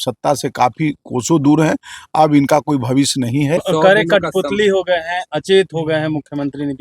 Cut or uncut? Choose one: cut